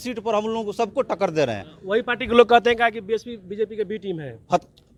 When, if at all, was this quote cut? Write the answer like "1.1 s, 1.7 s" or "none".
none